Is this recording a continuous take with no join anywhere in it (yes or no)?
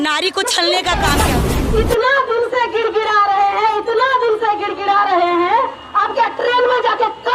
no